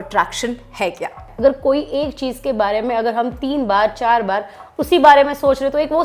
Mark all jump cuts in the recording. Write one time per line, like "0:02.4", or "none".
0:01.3